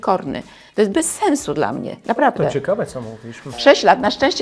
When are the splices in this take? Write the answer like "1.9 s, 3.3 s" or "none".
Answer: 3.5 s